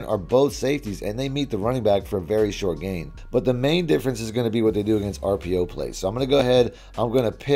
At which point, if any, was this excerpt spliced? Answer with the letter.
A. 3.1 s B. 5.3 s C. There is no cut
C